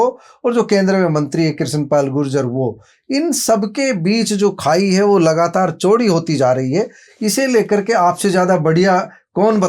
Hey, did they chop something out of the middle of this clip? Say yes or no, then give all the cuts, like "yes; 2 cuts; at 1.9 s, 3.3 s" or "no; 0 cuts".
no; 0 cuts